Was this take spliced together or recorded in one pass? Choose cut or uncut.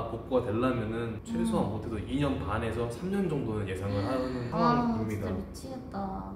uncut